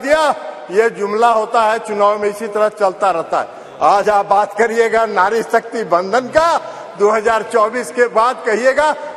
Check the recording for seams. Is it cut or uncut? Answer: uncut